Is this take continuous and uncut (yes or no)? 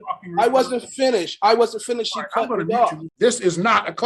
no